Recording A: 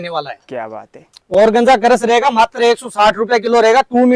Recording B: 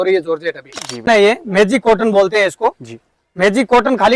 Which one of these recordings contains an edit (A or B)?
B